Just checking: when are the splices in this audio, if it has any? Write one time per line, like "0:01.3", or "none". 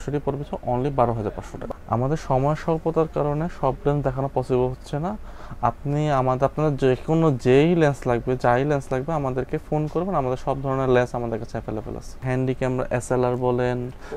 none